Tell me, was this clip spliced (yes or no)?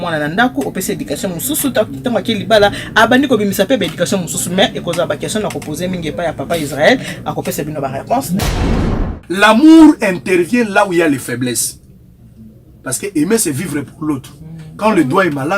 yes